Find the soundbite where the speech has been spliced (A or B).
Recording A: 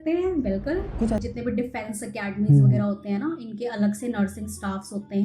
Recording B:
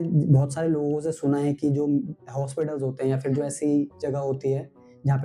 A